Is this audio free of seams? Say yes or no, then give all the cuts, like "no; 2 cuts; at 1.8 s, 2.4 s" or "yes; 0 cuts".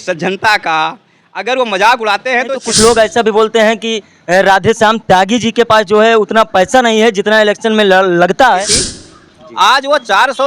no; 2 cuts; at 2.6 s, 8.8 s